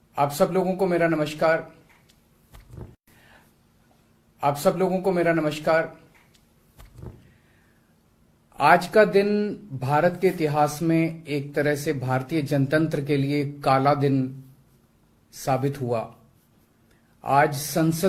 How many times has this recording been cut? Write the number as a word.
one